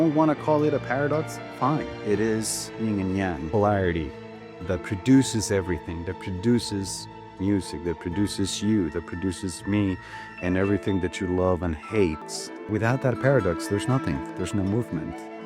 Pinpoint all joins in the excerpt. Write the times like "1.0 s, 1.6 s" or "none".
12.2 s